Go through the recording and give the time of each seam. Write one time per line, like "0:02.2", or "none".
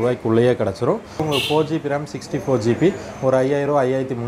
0:01.2